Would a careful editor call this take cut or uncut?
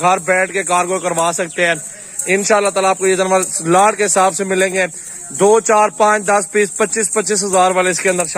uncut